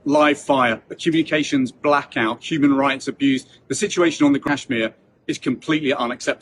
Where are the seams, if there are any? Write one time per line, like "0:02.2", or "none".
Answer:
0:04.4